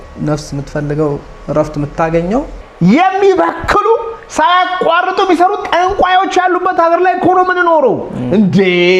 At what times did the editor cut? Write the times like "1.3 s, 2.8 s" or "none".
2.6 s